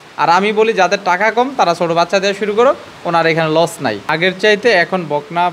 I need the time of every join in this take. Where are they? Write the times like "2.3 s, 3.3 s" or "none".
4.1 s